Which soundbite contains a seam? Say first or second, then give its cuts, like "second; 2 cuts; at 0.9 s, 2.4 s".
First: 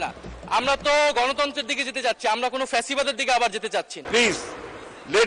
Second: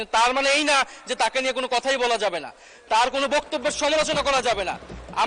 first; 1 cut; at 4.0 s